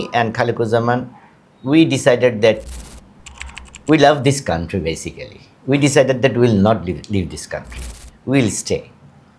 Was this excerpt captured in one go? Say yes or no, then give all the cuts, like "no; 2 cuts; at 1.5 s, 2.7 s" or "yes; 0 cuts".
yes; 0 cuts